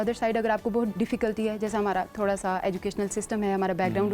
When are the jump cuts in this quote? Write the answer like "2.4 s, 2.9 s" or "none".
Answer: none